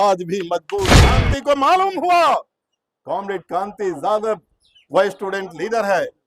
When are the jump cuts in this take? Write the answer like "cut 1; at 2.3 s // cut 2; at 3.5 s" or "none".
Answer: cut 1; at 1.2 s